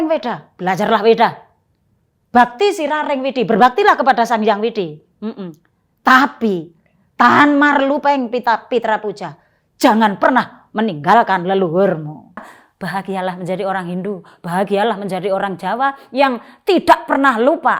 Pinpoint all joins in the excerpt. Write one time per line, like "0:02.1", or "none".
0:12.6